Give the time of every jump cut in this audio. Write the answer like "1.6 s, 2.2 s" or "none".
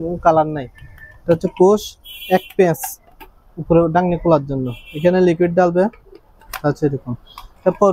none